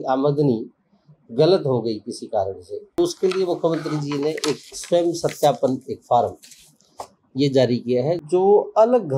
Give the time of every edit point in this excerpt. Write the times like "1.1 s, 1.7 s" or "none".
3.0 s, 8.2 s